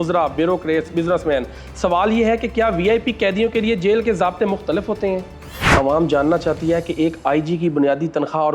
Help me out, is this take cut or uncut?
cut